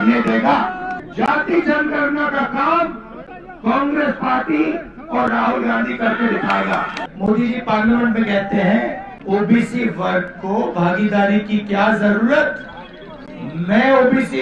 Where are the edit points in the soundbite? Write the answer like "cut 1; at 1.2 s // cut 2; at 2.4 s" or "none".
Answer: cut 1; at 1.0 s // cut 2; at 7.0 s // cut 3; at 9.1 s

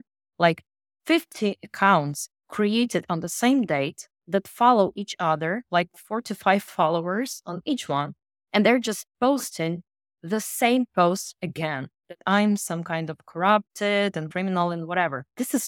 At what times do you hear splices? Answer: cut 1; at 14.3 s

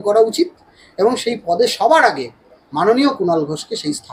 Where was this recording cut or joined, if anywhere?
none

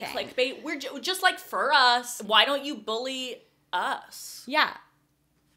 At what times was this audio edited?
cut 1; at 2.1 s

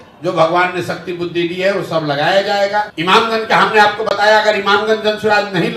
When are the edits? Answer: cut 1; at 2.9 s

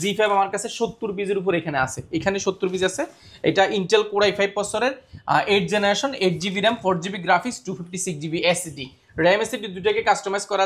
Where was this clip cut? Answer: none

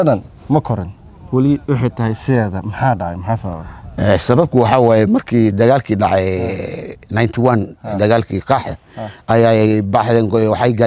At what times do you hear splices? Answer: none

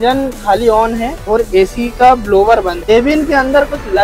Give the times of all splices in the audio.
cut 1; at 1.1 s // cut 2; at 2.9 s

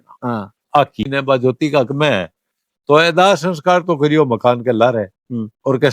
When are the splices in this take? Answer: cut 1; at 1.1 s

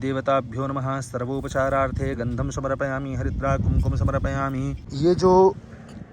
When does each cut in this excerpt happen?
cut 1; at 4.8 s

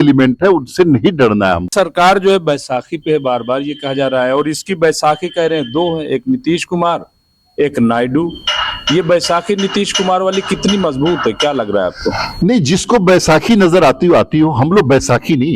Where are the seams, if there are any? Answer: cut 1; at 1.7 s

